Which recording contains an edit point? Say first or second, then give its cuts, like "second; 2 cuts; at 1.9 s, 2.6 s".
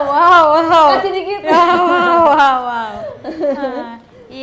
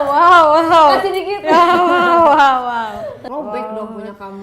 second; 1 cut; at 3.2 s